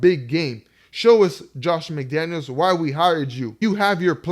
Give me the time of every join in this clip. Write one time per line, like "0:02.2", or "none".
0:03.4